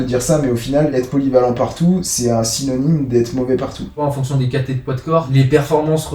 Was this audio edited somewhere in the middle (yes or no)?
yes